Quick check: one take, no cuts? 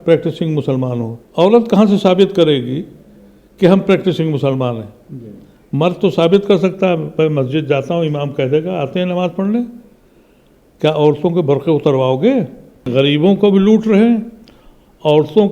no; 2 cuts; at 1.2 s, 12.9 s

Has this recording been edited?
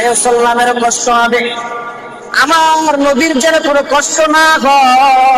no; 0 cuts

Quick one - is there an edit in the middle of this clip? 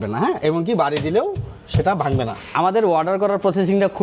yes; 1 cut; at 2.5 s

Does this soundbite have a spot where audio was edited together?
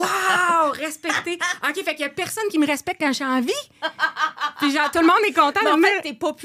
no; 0 cuts

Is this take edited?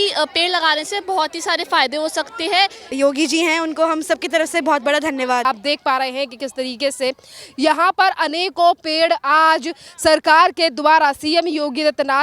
yes; 2 cuts; at 2.9 s, 5.5 s

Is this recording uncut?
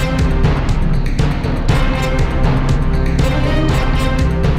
yes; 0 cuts

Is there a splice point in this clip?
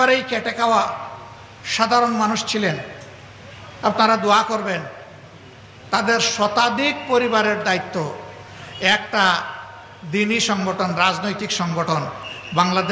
no; 0 cuts

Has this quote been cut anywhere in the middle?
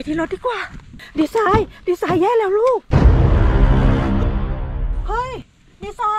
yes; 1 cut; at 0.9 s

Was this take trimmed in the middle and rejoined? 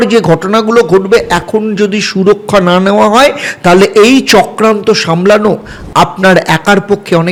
no; 0 cuts

